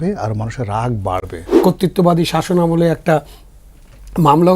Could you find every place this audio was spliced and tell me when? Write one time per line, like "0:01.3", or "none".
0:01.5